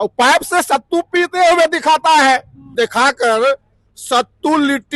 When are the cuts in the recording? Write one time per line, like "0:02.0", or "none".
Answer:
0:02.7

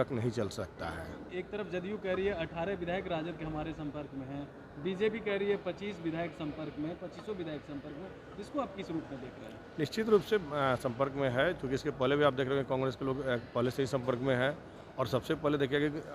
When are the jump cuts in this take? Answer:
0:01.2

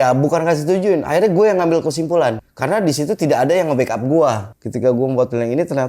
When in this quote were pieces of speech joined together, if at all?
0:02.5
0:04.5

